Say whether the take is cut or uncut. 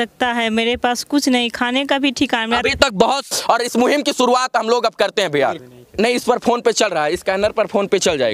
cut